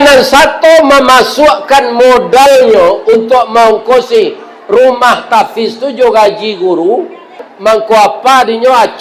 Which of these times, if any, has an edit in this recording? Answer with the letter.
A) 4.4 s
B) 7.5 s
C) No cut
B